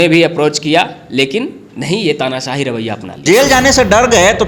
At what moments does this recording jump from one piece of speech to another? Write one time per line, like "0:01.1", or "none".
0:03.2